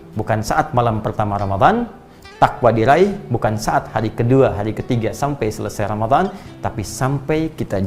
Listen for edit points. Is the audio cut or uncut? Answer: uncut